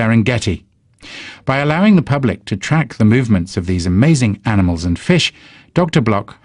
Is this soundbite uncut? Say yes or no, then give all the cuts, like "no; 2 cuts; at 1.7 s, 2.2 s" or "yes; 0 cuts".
no; 1 cut; at 4.1 s